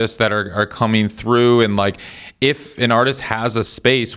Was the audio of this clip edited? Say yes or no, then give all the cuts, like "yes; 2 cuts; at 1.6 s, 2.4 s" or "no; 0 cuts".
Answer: no; 0 cuts